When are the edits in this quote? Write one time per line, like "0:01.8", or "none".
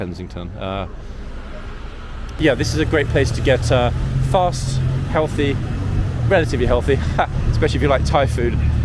0:02.4